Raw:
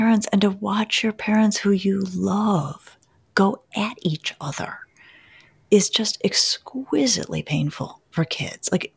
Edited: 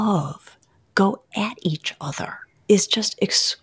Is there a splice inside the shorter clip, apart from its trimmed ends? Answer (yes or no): yes